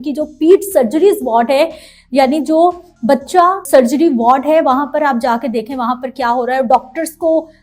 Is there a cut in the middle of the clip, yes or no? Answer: yes